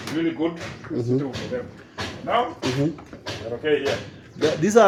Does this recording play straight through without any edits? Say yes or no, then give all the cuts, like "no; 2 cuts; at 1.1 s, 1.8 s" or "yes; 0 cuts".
yes; 0 cuts